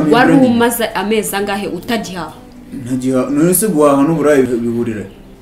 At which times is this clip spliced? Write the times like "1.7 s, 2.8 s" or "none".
4.5 s